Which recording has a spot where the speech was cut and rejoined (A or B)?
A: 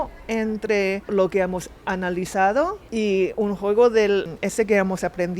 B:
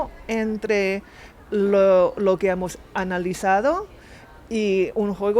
A